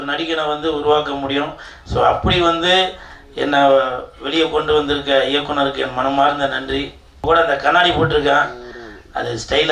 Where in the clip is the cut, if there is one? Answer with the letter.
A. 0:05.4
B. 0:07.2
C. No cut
B